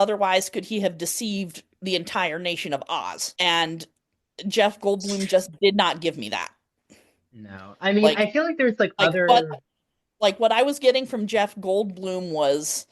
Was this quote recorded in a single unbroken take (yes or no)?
no